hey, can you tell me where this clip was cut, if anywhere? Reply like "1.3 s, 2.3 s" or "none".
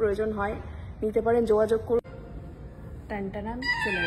2.0 s